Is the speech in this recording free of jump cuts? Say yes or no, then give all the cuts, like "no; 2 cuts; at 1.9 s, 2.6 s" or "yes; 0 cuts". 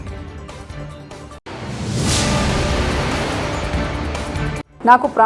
yes; 0 cuts